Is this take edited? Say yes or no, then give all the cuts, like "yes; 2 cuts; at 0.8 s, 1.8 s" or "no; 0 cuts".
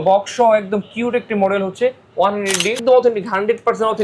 yes; 1 cut; at 2.8 s